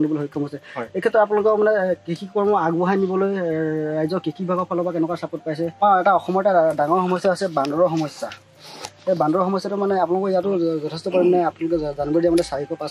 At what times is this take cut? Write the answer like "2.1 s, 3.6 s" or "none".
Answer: 5.8 s